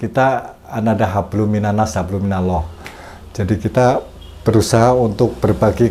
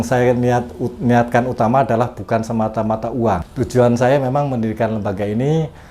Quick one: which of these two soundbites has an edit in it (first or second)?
second